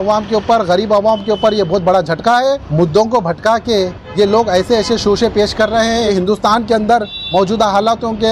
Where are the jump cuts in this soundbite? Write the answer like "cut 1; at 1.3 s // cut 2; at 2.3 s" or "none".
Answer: cut 1; at 2.7 s // cut 2; at 6.1 s